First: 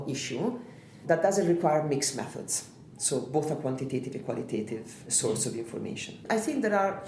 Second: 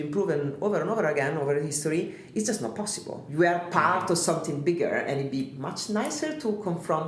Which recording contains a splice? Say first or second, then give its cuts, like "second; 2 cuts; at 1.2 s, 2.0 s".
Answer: first; 3 cuts; at 1.0 s, 5.1 s, 6.2 s